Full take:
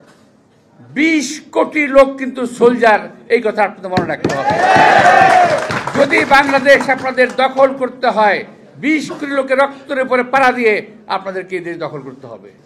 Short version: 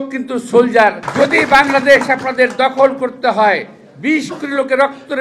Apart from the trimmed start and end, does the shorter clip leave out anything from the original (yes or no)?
yes